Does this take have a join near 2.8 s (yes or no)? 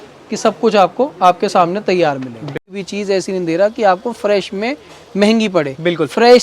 yes